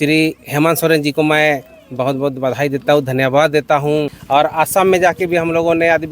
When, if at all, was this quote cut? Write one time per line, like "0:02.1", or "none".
0:04.2